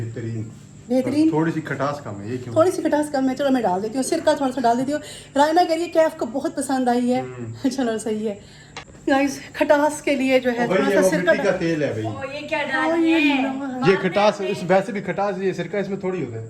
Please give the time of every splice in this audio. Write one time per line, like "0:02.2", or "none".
none